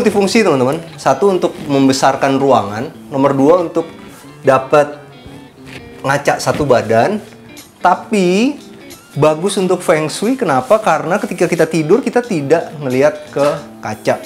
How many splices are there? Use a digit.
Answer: 0